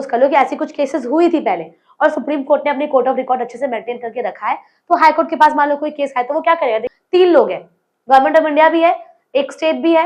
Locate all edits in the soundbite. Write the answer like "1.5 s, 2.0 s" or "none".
6.8 s